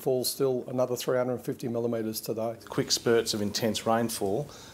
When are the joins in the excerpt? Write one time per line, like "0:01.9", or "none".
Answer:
0:02.6